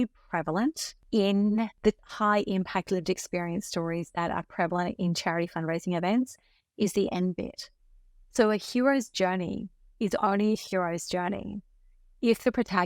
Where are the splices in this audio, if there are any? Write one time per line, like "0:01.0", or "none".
0:00.9
0:02.1